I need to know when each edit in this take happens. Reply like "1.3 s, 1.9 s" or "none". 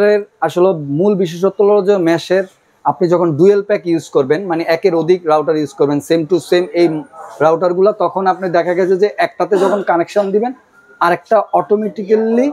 none